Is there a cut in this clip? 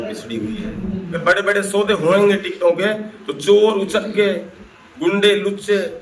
yes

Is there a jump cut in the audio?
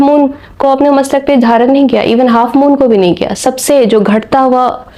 no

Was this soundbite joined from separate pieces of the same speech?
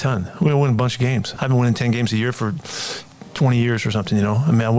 yes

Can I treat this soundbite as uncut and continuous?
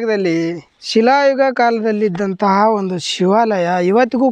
yes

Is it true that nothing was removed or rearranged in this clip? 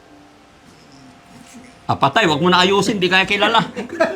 yes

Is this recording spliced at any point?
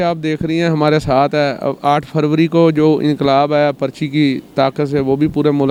no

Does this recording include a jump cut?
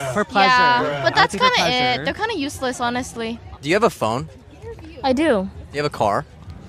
yes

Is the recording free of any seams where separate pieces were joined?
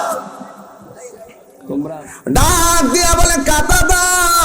no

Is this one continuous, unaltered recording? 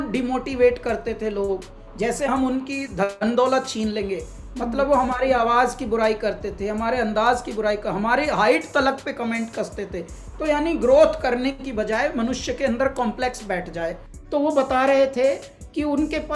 no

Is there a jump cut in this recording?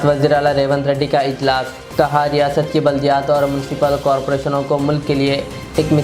no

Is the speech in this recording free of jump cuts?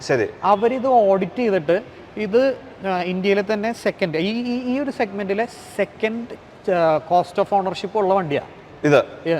yes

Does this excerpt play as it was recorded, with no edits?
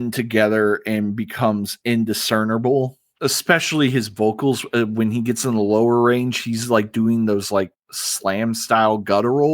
no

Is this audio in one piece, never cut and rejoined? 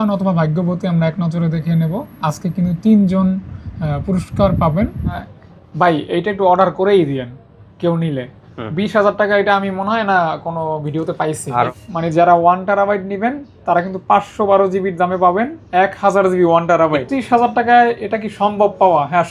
no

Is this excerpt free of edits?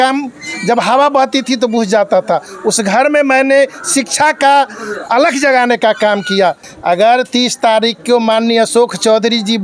no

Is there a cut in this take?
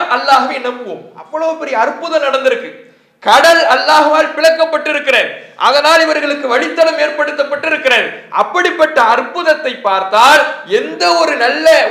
no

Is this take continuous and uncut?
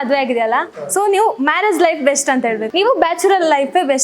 no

